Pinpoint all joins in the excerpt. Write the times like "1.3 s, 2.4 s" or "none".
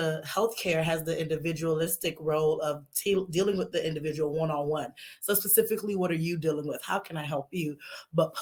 none

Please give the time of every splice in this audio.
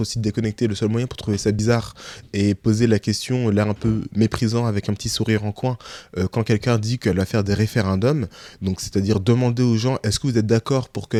none

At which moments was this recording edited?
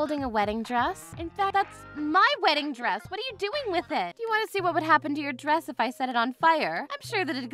4.1 s

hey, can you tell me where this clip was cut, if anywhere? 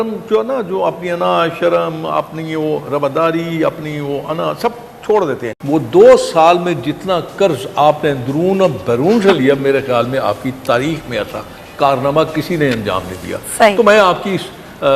5.5 s

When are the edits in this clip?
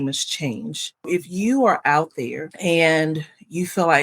1.1 s

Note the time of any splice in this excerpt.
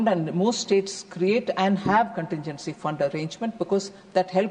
none

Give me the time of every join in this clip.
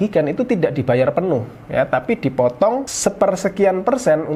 none

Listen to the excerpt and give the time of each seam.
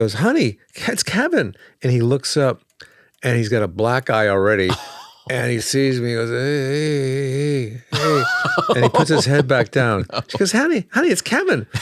none

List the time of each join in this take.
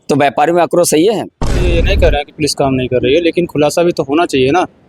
1.7 s

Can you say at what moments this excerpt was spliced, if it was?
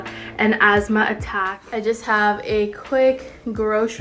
1.3 s

